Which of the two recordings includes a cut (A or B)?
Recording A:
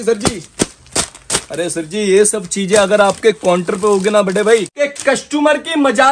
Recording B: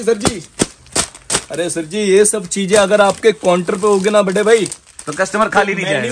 A